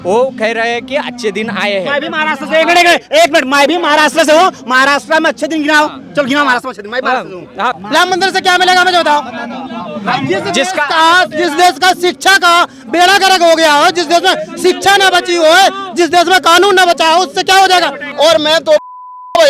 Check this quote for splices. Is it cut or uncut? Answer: cut